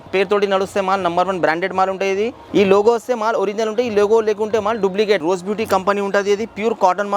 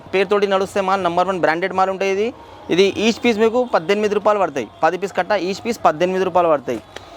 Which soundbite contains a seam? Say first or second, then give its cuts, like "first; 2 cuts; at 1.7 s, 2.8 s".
first; 2 cuts; at 2.4 s, 5.2 s